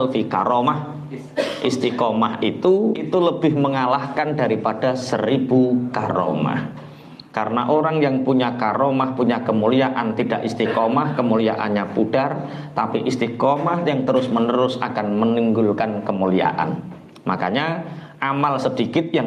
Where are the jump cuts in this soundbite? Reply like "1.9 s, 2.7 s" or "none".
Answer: 3.0 s